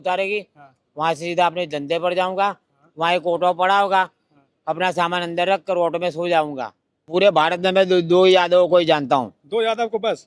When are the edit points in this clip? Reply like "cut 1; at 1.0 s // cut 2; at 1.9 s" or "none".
cut 1; at 7.1 s